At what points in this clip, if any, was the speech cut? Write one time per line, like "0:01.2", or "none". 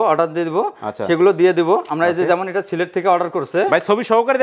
none

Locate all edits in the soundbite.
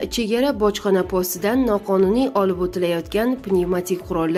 none

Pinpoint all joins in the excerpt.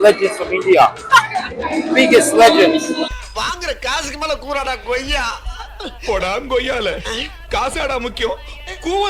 none

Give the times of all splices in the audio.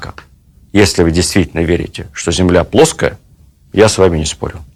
none

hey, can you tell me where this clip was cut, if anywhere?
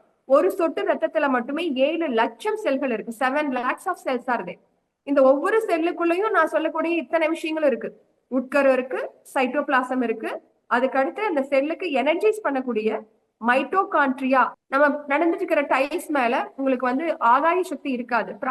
0:14.6

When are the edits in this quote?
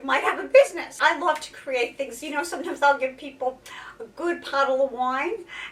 0:00.9

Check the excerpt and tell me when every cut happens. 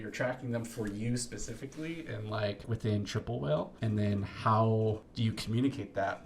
0:02.7
0:03.7
0:05.1

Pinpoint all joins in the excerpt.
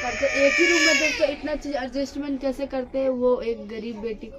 none

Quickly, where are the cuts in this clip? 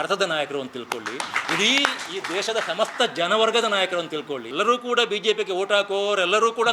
0:04.4

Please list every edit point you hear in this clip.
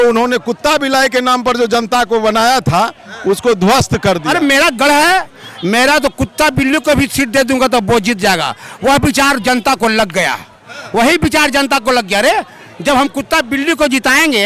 0:04.2

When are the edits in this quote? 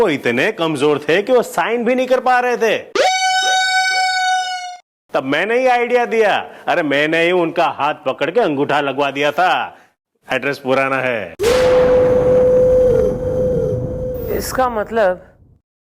none

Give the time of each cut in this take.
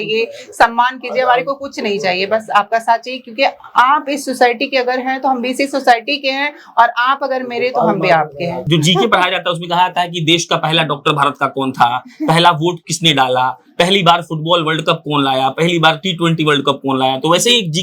0:08.6

